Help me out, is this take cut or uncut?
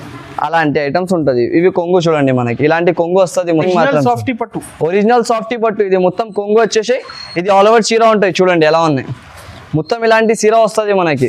cut